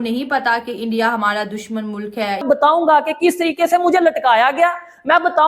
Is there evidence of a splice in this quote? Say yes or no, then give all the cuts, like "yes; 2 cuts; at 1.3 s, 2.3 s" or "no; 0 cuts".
yes; 1 cut; at 2.4 s